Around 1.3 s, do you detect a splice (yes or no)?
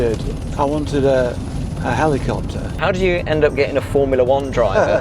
no